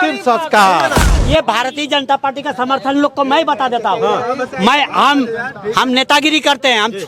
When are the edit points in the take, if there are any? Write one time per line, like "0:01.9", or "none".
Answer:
0:01.1

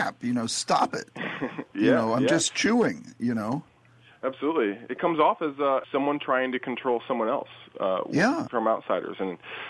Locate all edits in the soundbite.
0:05.9
0:08.4

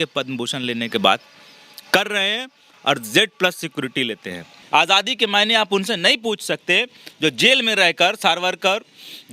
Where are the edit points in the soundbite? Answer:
0:04.5

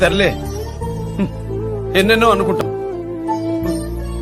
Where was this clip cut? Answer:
0:02.6

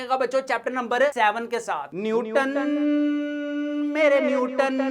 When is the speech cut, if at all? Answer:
0:01.9

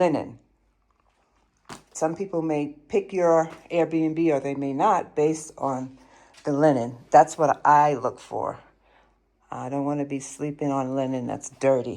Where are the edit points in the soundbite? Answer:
0:01.9

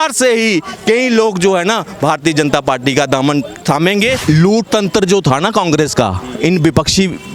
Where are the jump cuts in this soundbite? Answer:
0:04.2

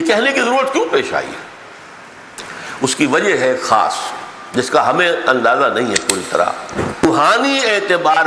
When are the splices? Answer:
0:07.0

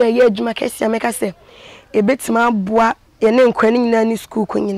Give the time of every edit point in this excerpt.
0:03.1

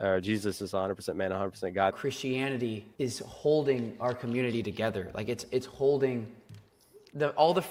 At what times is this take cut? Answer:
none

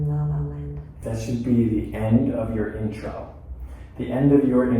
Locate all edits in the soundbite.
0:00.9

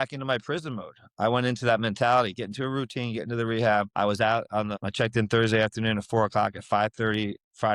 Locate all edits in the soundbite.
0:03.9
0:04.8

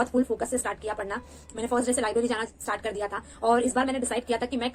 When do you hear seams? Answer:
none

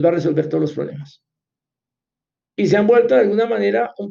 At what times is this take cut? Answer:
none

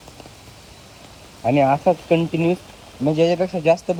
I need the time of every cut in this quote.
none

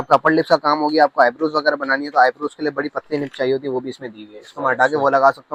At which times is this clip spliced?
none

